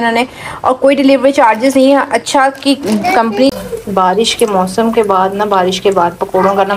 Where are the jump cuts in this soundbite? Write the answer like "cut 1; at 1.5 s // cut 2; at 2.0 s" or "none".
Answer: cut 1; at 3.5 s